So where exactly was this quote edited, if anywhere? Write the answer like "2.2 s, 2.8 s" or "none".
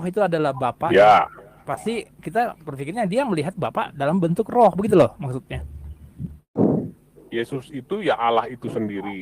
6.6 s